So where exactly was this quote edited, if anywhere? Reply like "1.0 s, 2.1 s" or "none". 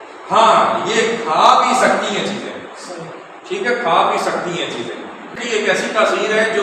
5.4 s